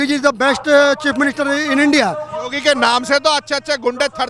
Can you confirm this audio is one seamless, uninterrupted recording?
yes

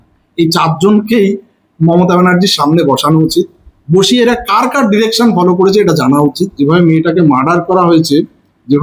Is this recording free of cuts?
no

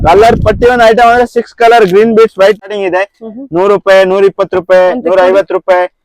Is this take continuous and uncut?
no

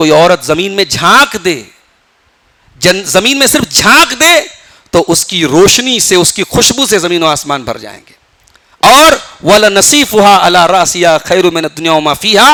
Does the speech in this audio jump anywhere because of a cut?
no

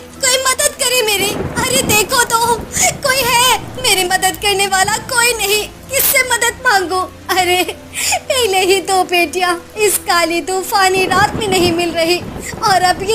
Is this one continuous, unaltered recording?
no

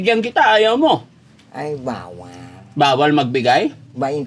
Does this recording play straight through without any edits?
yes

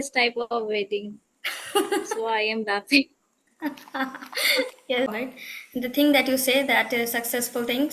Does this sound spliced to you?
yes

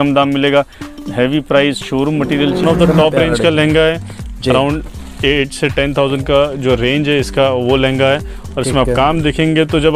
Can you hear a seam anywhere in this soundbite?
yes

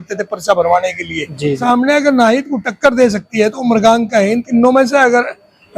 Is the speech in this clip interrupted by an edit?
yes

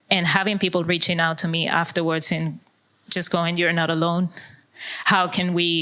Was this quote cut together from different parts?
no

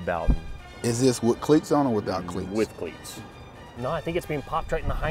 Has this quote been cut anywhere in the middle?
yes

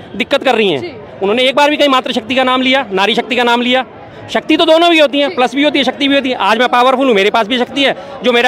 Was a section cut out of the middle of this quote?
no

